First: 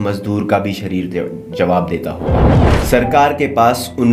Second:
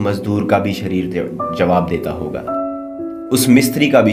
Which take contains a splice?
first; 1 cut; at 2.4 s

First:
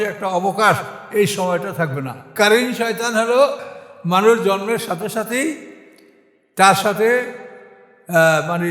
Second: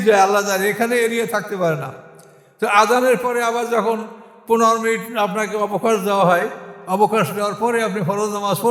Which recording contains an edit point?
first; 2 cuts; at 2.3 s, 3.6 s

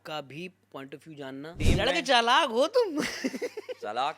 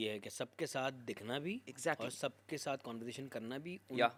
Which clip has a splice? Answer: first; 1 cut; at 1.5 s

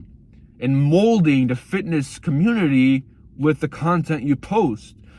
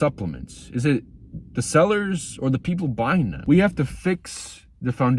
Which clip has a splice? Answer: second; 1 cut; at 3.4 s

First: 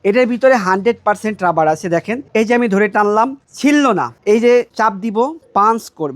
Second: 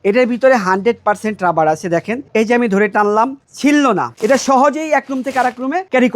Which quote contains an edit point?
second; 1 cut; at 4.1 s

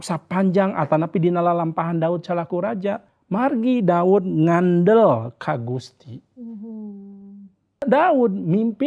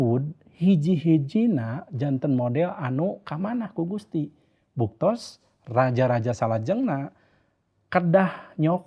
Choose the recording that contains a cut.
first; 2 cuts; at 3.1 s, 7.8 s

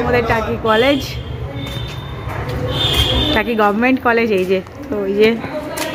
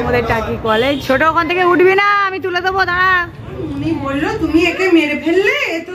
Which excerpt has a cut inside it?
second; 2 cuts; at 1.0 s, 3.7 s

